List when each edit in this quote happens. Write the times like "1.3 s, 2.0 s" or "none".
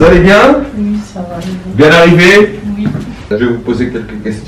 3.2 s